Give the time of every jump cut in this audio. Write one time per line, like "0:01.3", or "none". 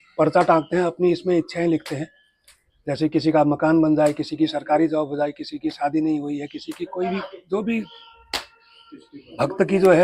none

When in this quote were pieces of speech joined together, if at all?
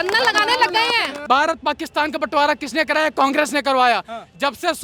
0:01.1

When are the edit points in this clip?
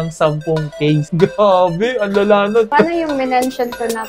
0:02.7

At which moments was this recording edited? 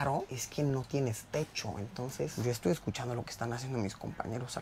0:02.4

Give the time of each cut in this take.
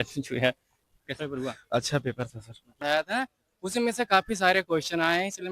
0:02.8

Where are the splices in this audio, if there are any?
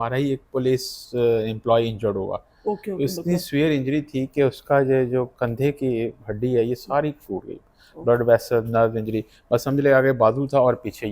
0:01.0

